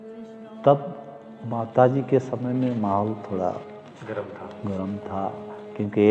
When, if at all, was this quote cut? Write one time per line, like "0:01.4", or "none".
none